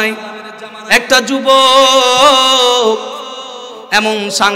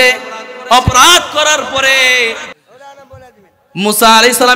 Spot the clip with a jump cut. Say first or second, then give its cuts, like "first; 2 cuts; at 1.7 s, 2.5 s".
second; 1 cut; at 2.6 s